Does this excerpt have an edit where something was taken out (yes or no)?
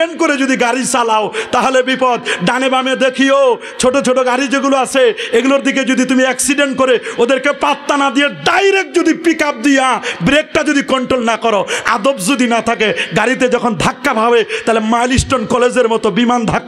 no